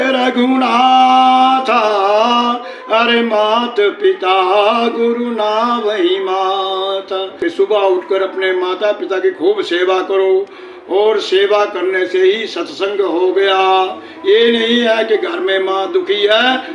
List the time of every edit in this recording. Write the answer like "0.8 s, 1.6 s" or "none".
7.3 s